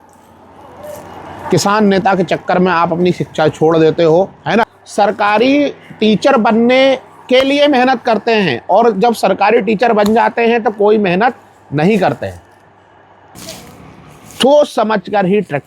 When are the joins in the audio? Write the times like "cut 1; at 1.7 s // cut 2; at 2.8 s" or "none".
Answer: cut 1; at 4.8 s // cut 2; at 13.3 s